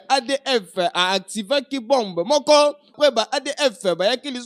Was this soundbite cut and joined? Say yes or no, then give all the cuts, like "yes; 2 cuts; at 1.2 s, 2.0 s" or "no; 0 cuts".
yes; 1 cut; at 2.9 s